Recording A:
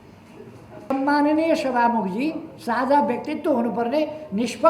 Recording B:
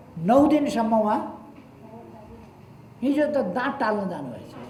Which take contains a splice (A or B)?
A